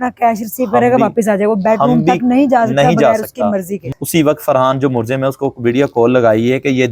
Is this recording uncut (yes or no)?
no